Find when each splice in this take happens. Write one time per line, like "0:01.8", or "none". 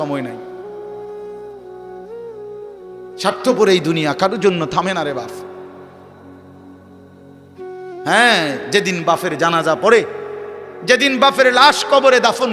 none